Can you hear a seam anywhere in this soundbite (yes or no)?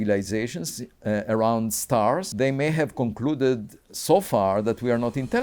yes